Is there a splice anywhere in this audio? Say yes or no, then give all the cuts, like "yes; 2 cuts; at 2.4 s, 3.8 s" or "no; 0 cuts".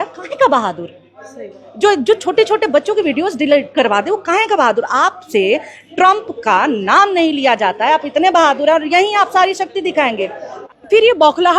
yes; 1 cut; at 10.6 s